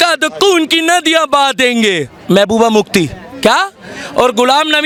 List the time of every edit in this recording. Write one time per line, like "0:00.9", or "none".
none

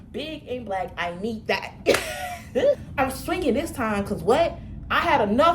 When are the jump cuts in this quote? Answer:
0:02.8

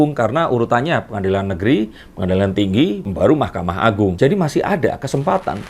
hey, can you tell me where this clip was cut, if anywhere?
none

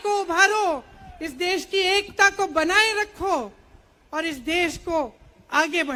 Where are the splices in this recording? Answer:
none

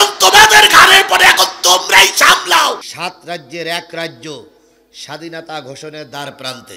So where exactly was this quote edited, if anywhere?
0:02.9

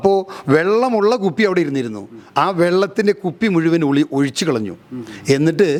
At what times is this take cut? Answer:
none

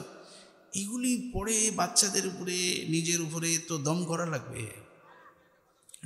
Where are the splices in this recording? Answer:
none

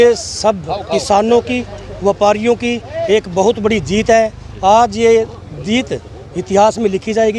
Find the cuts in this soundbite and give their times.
none

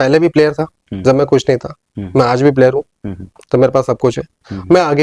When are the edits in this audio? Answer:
none

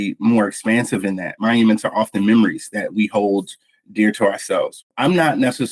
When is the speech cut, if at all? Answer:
0:01.4
0:04.7

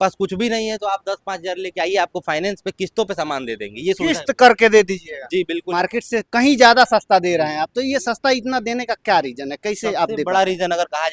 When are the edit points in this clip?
0:05.6

